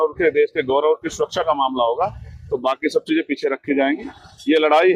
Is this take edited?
no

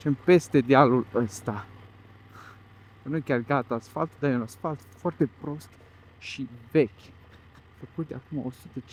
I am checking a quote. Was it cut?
no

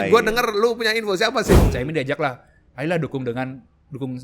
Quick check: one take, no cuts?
no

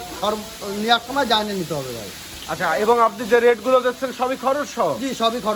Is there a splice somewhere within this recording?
no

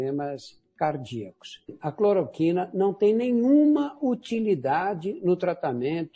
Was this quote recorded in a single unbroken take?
no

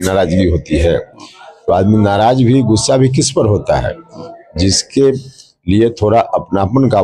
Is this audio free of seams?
yes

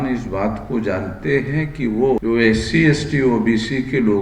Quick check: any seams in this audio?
yes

